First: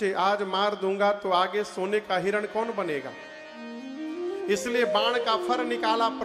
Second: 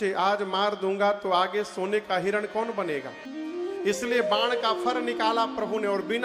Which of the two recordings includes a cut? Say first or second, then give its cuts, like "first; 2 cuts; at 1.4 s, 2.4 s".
second; 1 cut; at 3.2 s